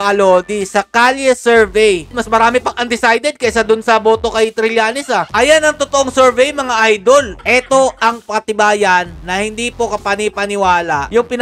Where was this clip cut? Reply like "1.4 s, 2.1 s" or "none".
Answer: 2.1 s, 7.4 s